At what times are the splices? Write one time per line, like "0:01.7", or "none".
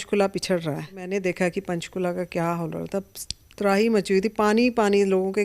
0:01.0